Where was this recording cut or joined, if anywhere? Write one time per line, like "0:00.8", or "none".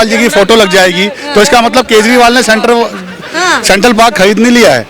none